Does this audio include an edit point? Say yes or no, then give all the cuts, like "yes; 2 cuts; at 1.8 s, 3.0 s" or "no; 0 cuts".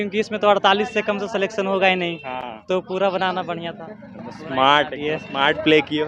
no; 0 cuts